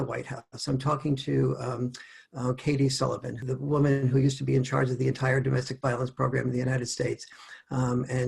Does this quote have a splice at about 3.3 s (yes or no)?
yes